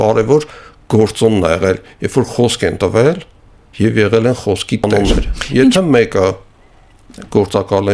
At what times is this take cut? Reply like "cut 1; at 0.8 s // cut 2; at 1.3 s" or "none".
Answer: cut 1; at 4.8 s